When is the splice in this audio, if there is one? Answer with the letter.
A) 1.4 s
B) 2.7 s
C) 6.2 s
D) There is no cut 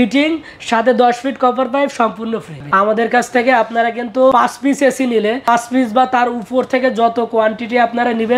B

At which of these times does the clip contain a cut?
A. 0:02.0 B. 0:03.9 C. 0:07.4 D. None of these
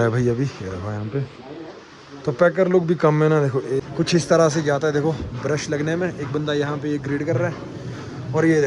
B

